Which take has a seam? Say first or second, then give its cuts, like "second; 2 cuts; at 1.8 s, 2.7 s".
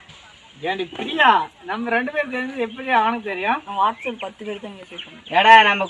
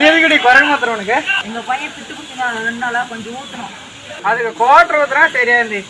second; 2 cuts; at 1.4 s, 4.0 s